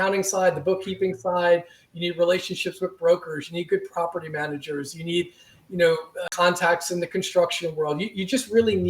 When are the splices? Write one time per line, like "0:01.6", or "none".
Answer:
0:06.2